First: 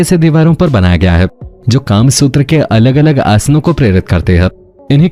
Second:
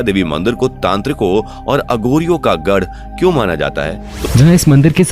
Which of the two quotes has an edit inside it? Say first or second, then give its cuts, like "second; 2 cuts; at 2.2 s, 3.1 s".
second; 1 cut; at 4.1 s